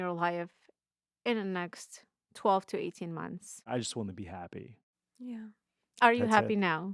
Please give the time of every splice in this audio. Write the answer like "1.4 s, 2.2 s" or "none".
none